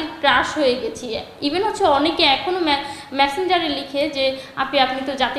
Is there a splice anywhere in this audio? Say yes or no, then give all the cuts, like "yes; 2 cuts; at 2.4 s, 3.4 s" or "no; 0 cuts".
no; 0 cuts